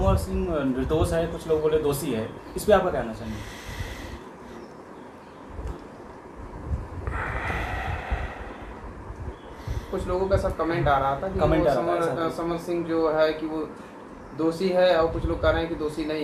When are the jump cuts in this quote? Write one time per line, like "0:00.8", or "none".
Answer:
none